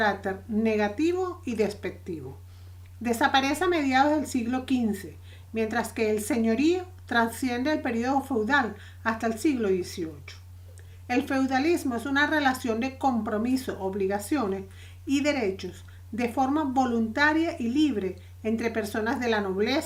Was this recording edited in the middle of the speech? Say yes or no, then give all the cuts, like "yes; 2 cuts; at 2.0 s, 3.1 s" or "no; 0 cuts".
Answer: no; 0 cuts